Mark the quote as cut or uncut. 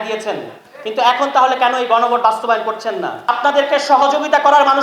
cut